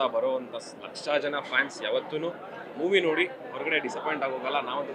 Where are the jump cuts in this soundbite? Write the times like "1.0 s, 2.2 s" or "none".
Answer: none